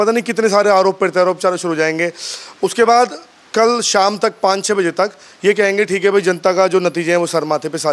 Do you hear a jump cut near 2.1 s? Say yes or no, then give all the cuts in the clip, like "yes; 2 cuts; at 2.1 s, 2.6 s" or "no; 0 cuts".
no; 0 cuts